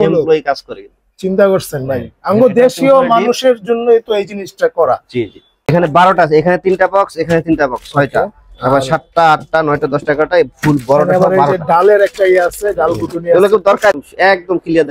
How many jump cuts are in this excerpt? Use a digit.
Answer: 2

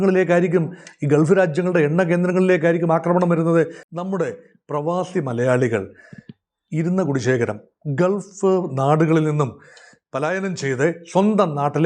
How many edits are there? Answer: 1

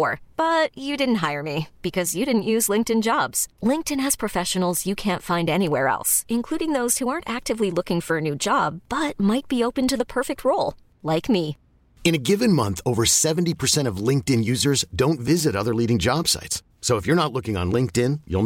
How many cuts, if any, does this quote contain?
0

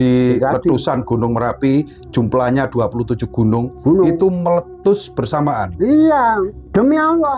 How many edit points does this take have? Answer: 1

